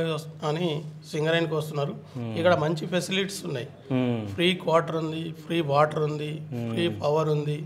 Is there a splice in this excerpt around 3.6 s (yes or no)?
no